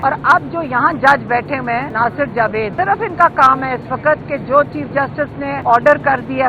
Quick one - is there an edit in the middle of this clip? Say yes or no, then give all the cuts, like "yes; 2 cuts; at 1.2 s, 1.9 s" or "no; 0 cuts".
yes; 3 cuts; at 1.9 s, 2.7 s, 5.6 s